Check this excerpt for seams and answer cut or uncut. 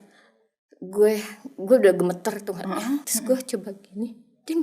cut